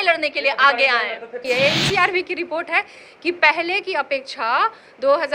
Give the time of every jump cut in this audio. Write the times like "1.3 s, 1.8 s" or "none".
1.4 s